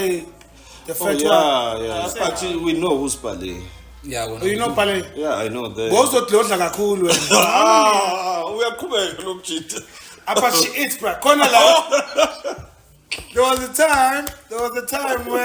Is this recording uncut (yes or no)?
no